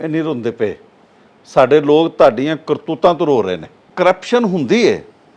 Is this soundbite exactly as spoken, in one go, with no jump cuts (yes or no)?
no